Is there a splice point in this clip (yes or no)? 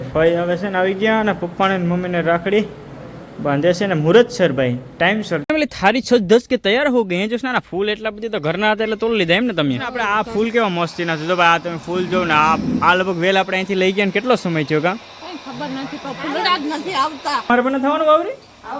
yes